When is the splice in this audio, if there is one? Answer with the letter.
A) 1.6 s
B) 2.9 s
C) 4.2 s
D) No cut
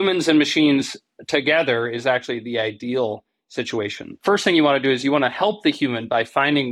C